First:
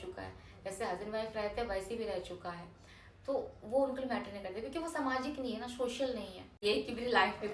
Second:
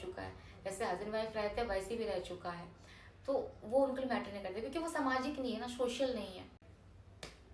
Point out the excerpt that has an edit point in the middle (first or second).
first